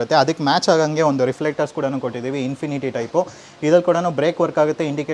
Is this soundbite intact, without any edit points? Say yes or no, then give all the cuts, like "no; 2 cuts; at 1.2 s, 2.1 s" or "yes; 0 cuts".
yes; 0 cuts